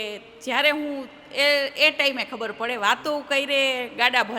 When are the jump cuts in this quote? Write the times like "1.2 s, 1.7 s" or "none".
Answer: none

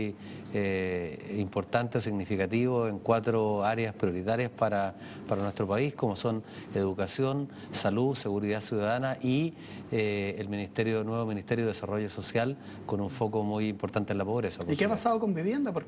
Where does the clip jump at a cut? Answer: 2.8 s

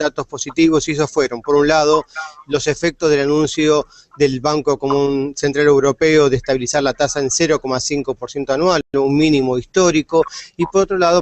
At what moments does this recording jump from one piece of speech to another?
none

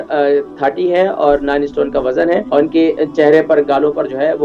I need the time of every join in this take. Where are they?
2.5 s

